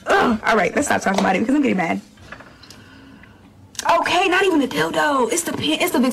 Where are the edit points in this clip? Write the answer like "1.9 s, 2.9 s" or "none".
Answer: none